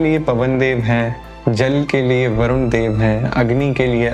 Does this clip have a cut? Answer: no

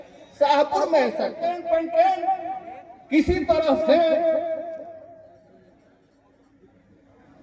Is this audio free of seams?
no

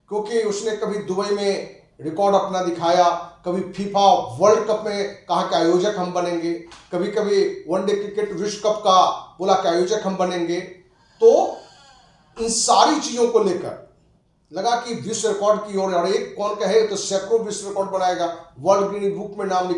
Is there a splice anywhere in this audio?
no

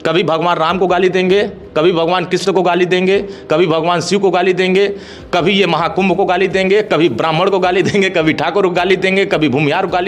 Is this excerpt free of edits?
yes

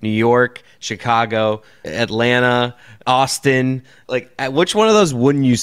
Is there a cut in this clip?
yes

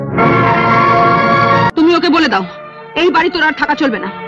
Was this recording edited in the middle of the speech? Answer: yes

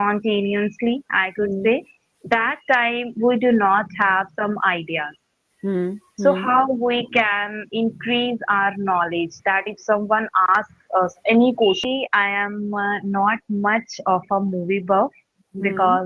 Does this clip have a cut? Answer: yes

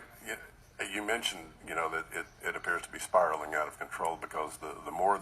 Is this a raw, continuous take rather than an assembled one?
no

